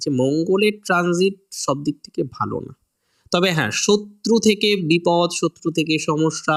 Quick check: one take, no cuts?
yes; 0 cuts

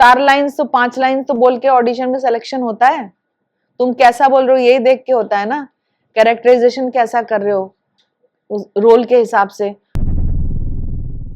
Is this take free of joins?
no; 1 cut; at 9.9 s

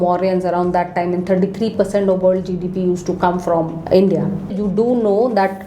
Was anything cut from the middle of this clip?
yes; 2 cuts; at 3.8 s, 4.5 s

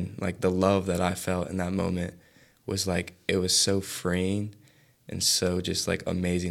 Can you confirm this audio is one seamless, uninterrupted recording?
yes; 0 cuts

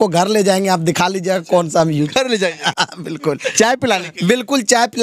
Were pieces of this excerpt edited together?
no; 0 cuts

